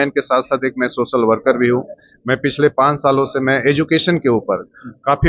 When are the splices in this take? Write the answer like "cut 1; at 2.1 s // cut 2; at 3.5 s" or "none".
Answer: none